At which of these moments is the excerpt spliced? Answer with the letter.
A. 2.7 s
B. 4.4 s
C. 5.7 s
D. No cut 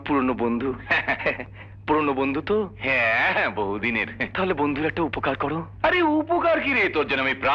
D